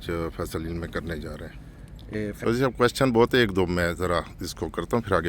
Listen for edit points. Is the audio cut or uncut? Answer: cut